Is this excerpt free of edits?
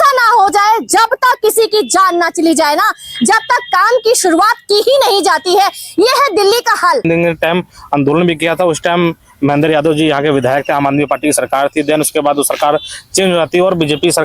no; 1 cut; at 7.0 s

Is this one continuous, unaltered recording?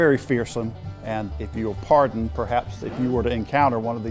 no; 1 cut; at 1.0 s

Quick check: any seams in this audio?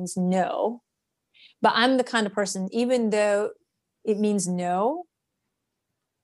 no; 0 cuts

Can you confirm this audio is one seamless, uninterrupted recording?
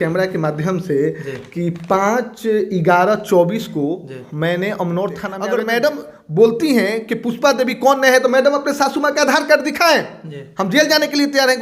no; 1 cut; at 5.3 s

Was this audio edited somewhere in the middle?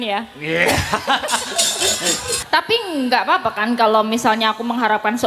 yes; 1 cut; at 2.4 s

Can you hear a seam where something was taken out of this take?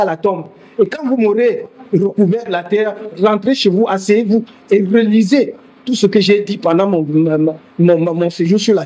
no; 0 cuts

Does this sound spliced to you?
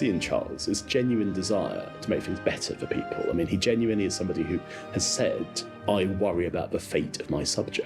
no; 0 cuts

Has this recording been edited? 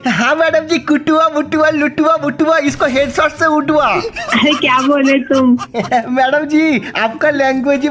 no; 0 cuts

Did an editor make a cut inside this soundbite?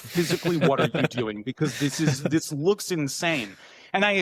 no; 0 cuts

